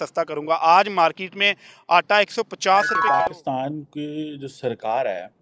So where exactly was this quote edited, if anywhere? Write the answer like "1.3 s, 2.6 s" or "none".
3.1 s